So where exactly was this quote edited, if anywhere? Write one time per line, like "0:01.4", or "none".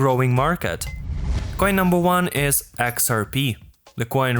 0:01.0